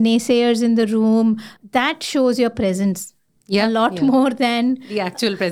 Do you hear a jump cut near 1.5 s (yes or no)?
yes